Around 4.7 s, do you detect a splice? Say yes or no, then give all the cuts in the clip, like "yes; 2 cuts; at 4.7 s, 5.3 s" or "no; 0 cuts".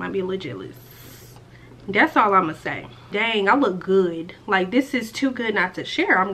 no; 1 cut; at 3.1 s